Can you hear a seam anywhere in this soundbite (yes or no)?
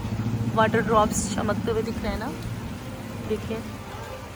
no